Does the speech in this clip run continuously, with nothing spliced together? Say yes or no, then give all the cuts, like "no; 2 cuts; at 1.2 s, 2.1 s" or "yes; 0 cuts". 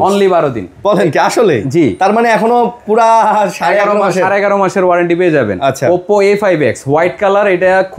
yes; 0 cuts